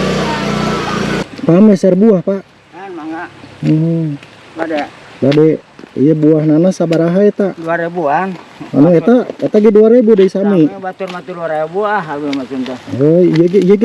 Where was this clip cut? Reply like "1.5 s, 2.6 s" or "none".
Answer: 1.2 s